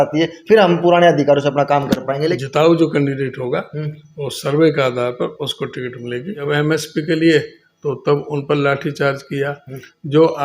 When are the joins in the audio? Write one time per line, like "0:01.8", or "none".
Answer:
0:02.4
0:06.4